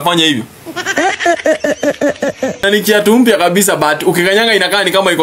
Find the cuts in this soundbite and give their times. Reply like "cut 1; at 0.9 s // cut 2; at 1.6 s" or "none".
cut 1; at 2.6 s